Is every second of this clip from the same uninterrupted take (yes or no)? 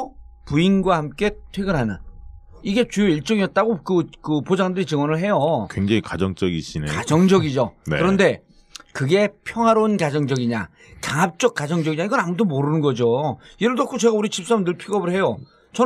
yes